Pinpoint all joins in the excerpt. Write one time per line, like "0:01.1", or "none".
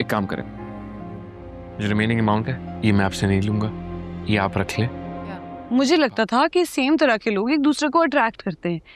0:05.5

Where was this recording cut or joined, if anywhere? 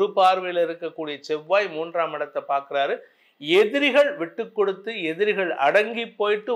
none

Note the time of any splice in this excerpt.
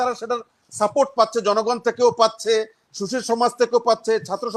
none

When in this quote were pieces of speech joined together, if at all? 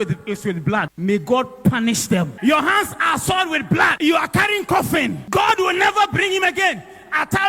0:00.9
0:02.3
0:03.9
0:05.2

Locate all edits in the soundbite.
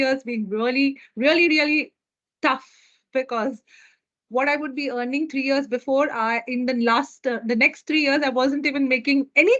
none

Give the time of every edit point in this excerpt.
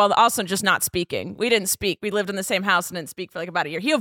none

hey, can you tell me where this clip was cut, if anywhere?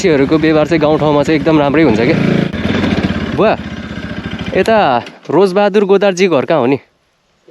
0:02.5

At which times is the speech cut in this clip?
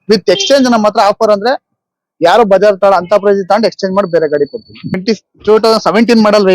0:05.0

